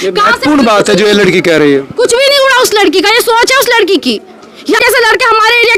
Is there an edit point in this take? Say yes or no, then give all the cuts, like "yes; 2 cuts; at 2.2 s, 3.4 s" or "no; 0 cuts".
no; 0 cuts